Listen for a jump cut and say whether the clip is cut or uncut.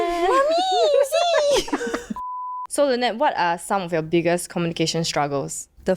uncut